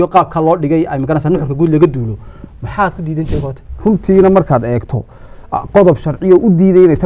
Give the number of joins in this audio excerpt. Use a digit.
1